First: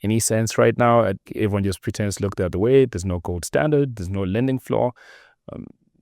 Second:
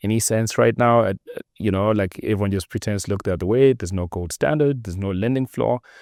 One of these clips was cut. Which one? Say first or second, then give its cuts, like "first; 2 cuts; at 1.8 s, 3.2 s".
first; 1 cut; at 1.3 s